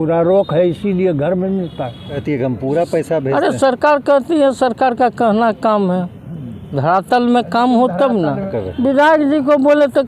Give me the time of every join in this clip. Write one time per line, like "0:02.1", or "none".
0:02.2
0:08.6

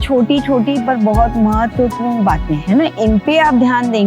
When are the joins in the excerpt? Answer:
none

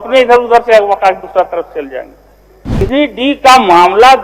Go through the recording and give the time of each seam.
0:02.8

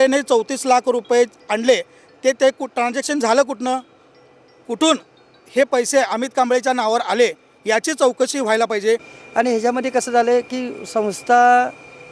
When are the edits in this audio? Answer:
0:09.2

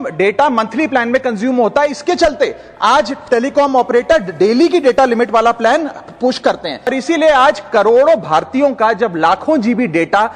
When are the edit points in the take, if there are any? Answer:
0:06.9

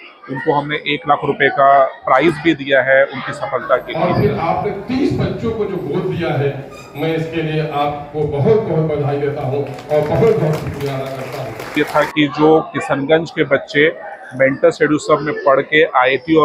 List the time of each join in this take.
0:03.9
0:11.8

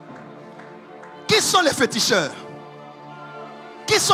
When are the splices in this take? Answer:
none

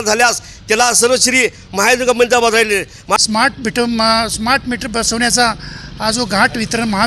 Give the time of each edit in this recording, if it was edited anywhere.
0:03.2

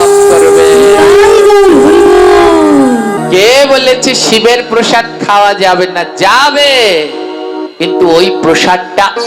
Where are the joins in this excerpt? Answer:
0:03.2

